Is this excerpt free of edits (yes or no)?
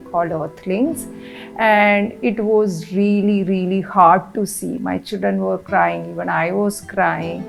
yes